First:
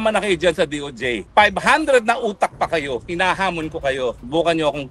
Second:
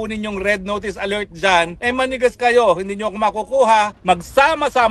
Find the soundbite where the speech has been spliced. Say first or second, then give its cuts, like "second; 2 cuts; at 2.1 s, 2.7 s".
second; 2 cuts; at 1.8 s, 3.9 s